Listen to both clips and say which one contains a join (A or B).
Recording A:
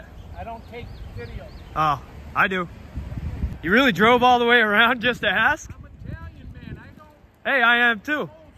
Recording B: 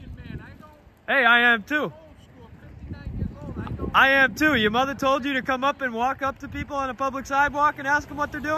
A